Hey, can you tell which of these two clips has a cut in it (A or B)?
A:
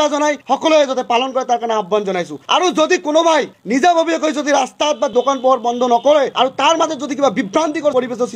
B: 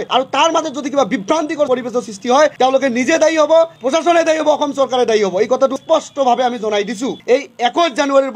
B